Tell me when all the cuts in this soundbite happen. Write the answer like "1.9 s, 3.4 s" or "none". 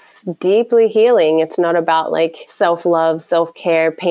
2.4 s

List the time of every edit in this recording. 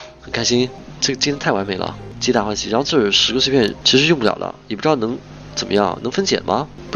none

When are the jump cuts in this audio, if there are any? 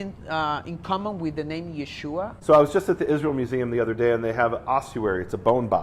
2.3 s

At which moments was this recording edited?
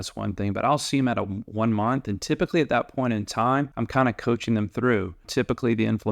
3.8 s, 5.3 s

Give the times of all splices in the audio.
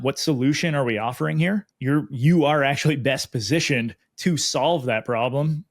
1.7 s

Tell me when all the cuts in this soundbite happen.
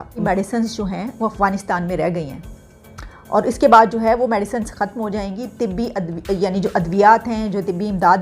none

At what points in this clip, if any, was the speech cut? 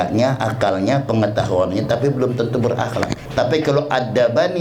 3.2 s

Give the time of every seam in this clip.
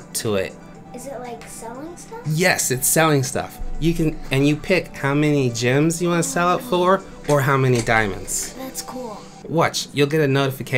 9.4 s

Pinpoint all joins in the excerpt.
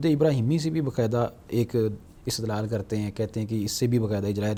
none

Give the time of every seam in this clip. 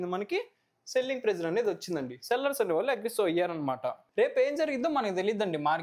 4.0 s

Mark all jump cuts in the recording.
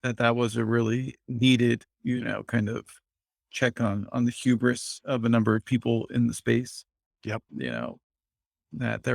none

